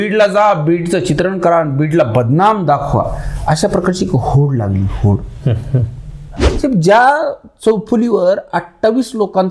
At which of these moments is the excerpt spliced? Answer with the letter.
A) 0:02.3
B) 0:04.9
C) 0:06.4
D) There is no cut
C